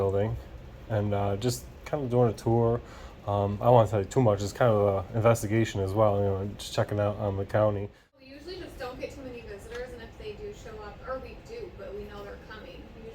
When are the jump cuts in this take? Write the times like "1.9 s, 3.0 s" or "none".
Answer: 8.2 s

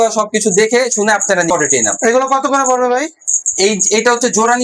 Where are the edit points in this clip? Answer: 1.5 s

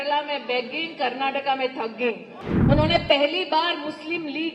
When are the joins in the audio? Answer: 2.3 s

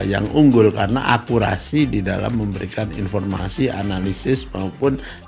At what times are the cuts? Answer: none

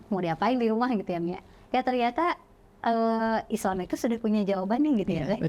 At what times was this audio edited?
none

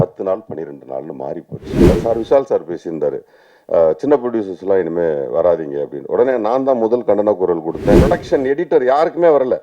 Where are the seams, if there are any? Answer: 1.9 s, 8.0 s

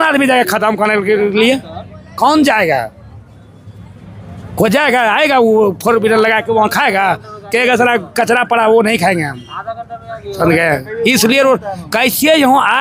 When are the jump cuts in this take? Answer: none

